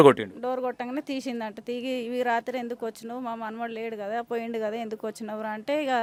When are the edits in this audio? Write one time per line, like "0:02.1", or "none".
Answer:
none